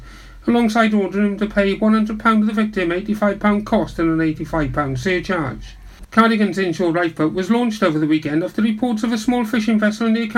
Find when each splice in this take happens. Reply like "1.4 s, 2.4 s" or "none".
5.8 s